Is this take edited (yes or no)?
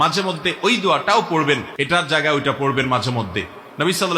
yes